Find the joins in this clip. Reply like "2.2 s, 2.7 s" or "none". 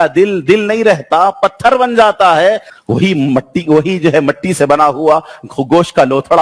2.7 s